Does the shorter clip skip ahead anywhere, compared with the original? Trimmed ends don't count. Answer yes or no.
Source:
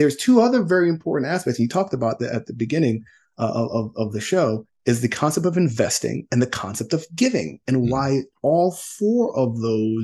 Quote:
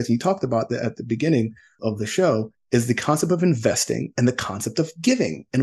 yes